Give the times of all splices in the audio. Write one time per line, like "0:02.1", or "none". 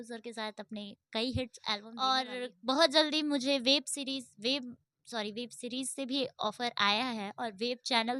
0:01.9